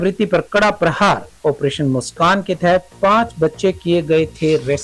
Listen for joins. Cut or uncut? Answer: uncut